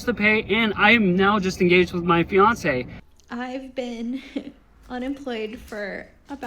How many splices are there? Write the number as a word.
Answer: one